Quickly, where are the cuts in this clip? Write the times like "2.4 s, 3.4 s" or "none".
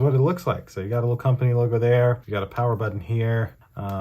none